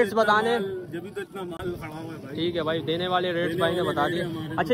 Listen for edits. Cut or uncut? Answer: uncut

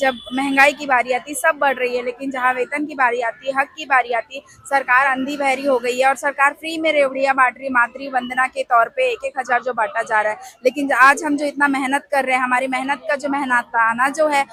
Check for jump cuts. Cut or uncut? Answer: uncut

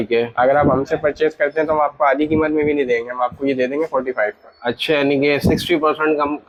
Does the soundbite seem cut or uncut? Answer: uncut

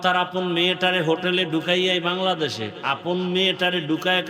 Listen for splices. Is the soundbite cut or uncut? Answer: uncut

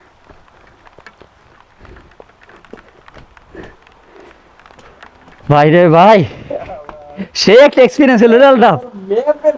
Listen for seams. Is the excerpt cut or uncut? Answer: uncut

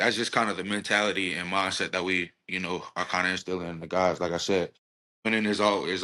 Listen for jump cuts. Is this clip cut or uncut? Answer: uncut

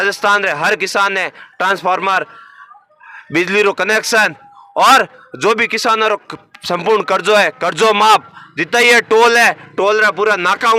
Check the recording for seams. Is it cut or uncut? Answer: uncut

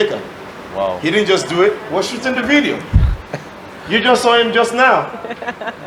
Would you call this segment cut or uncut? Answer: uncut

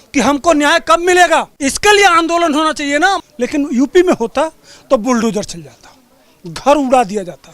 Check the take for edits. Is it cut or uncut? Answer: cut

